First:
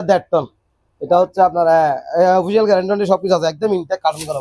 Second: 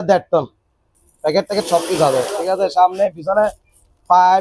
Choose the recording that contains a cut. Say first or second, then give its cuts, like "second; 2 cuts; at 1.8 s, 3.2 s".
second; 1 cut; at 0.9 s